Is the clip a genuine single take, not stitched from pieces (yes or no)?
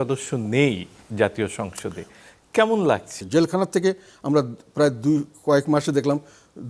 no